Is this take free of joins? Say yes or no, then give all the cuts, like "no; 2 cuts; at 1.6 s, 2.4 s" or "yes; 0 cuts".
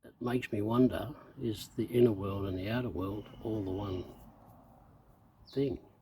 yes; 0 cuts